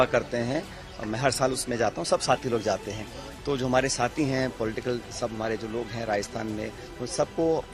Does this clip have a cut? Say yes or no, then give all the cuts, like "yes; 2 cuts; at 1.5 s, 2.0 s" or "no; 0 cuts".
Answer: no; 0 cuts